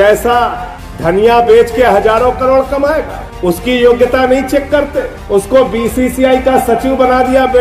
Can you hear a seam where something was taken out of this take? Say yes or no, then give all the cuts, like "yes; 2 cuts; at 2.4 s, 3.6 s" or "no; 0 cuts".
no; 0 cuts